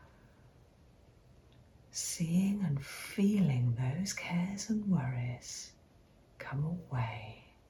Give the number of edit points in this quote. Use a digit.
0